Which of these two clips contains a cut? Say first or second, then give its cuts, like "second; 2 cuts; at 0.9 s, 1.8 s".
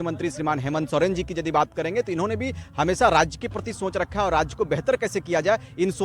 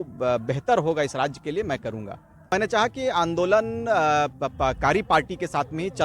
second; 1 cut; at 2.5 s